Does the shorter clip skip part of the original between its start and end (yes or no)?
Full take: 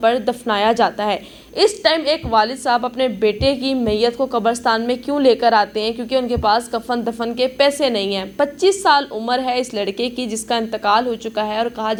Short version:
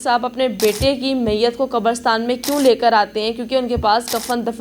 no